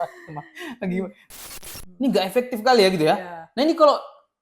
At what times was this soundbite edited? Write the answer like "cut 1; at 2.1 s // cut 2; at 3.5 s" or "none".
cut 1; at 1.4 s

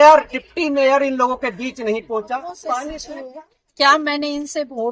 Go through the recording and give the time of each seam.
cut 1; at 2.9 s

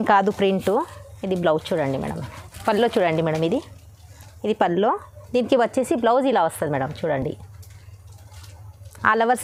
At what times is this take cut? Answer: none

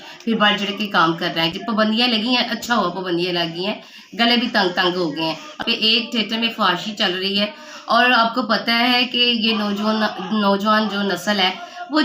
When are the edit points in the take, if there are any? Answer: cut 1; at 1.5 s // cut 2; at 5.6 s

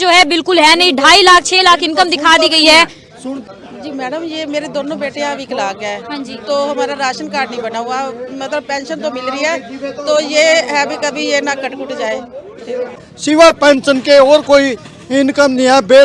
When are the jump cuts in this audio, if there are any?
cut 1; at 3.4 s // cut 2; at 13.0 s

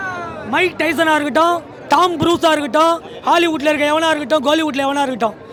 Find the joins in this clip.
none

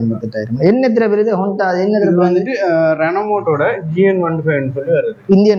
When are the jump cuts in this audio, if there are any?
none

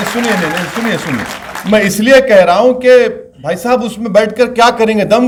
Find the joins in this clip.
none

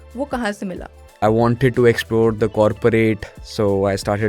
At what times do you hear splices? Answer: cut 1; at 1.2 s

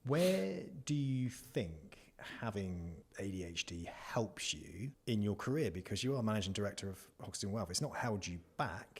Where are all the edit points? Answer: cut 1; at 3.0 s // cut 2; at 5.0 s

